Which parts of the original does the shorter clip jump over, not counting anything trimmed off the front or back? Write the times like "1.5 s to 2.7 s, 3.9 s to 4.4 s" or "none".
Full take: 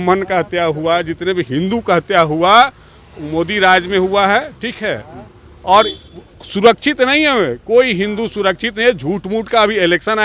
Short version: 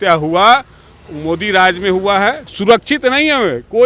4.6 s to 6.4 s